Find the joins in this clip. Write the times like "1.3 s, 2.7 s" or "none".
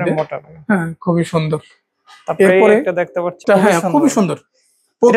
3.4 s